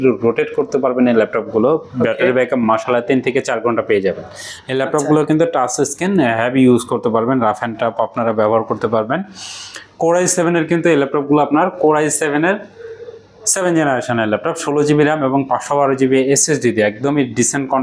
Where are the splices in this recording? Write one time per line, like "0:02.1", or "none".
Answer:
none